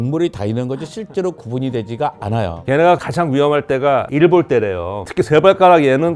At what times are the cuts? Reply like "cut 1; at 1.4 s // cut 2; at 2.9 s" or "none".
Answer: cut 1; at 2.6 s